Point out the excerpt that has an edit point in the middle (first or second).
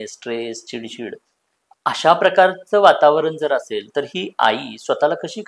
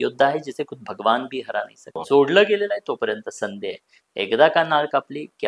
second